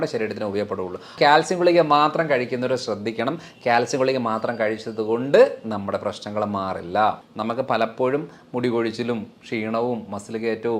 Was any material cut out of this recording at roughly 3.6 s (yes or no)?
no